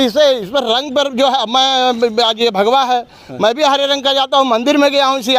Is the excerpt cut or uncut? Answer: uncut